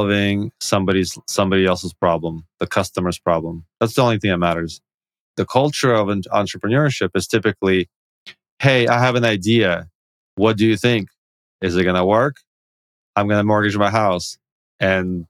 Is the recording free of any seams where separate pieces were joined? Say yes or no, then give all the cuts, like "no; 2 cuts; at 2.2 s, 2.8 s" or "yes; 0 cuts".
no; 1 cut; at 5.3 s